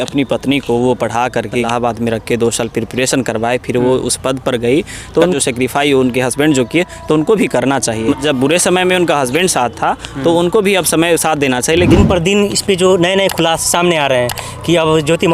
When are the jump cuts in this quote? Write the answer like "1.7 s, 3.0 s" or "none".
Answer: 1.7 s, 5.3 s, 8.2 s, 11.9 s